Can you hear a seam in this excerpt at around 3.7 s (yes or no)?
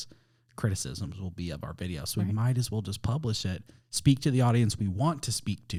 no